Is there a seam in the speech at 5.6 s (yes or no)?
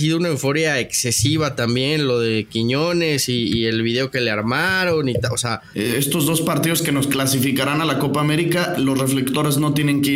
yes